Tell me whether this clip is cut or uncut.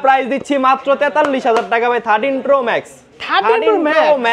uncut